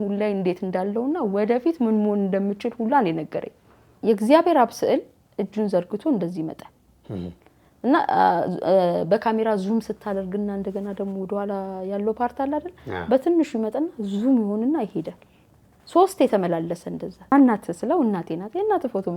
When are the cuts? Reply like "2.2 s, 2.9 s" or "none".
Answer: 3.9 s, 17.3 s